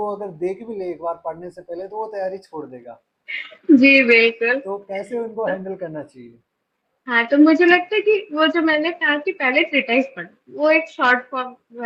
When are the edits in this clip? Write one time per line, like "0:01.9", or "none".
none